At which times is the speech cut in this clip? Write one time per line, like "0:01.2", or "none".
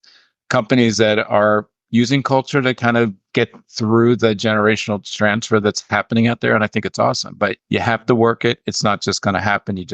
0:03.2
0:07.6